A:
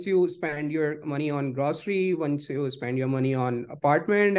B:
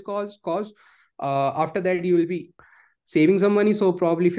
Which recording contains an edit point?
B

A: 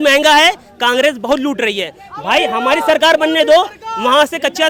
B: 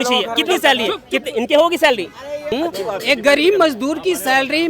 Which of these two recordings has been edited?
B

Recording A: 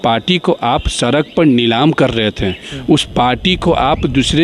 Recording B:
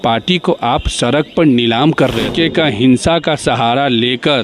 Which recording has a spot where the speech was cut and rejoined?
B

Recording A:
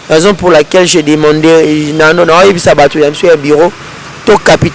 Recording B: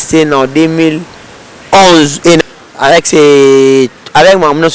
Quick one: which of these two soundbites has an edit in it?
B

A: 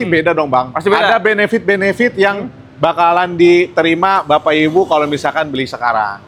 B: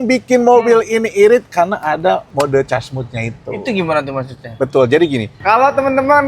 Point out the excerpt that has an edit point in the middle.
B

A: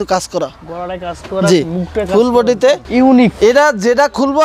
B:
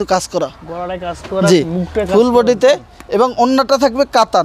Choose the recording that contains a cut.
A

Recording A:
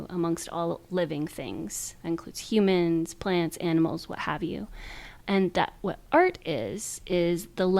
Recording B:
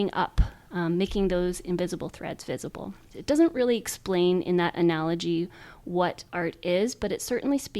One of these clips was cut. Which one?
B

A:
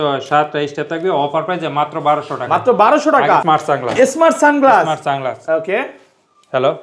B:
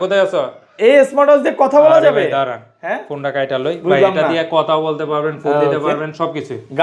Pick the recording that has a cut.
A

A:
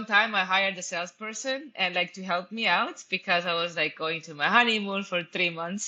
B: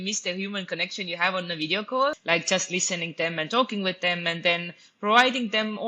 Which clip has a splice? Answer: B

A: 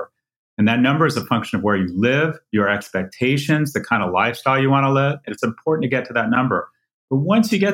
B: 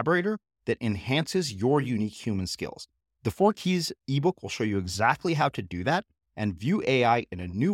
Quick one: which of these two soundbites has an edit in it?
A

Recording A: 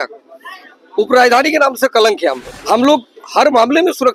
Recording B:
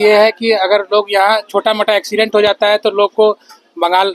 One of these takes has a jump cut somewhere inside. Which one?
A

